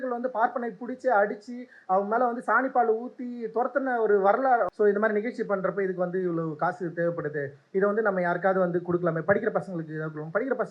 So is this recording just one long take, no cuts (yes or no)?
no